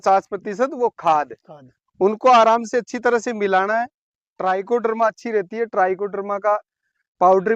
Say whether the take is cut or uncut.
cut